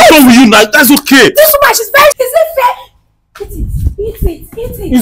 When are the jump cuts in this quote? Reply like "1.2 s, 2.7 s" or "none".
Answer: 2.2 s